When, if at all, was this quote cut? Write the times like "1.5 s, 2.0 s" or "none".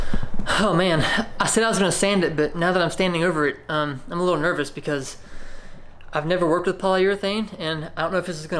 none

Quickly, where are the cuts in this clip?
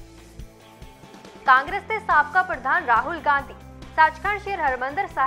none

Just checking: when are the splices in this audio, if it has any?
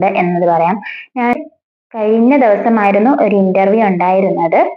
1.3 s

